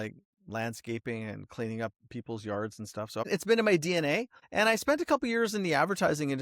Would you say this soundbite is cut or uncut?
cut